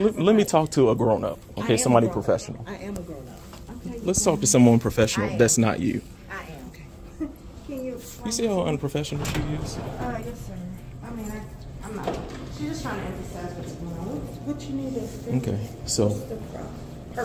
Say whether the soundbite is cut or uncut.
uncut